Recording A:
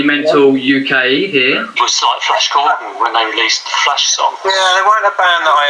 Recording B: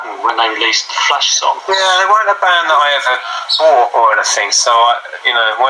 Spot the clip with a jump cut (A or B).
A